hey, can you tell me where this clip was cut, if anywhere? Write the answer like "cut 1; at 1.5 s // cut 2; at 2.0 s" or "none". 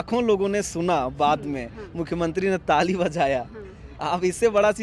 none